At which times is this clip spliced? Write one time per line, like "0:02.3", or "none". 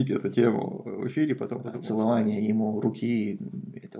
0:01.4